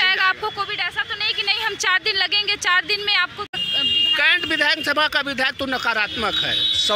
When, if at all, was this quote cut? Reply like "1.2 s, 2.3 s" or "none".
3.6 s